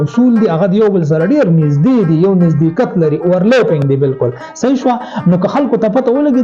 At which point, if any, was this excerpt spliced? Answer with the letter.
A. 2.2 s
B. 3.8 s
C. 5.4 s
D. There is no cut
D